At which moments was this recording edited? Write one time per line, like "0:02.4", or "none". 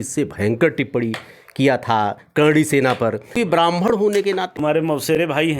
0:03.3
0:04.6